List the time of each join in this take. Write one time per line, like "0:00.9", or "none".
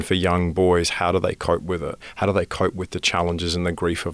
0:02.0